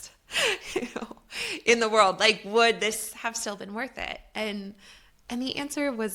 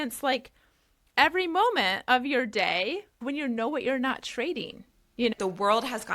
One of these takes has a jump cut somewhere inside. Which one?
second; 2 cuts; at 3.2 s, 5.3 s

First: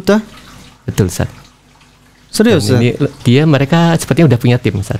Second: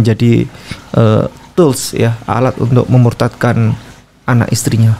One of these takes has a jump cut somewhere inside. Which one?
first; 1 cut; at 3.2 s

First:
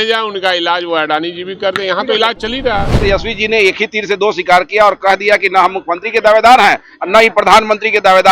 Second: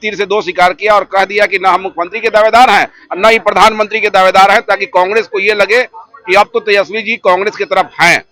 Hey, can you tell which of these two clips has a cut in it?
first; 1 cut; at 3.0 s

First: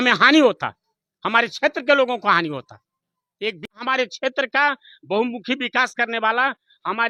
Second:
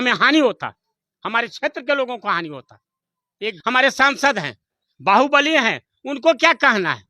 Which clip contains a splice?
second; 1 cut; at 3.6 s

